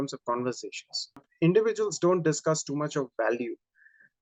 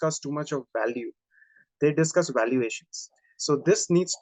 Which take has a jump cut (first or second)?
first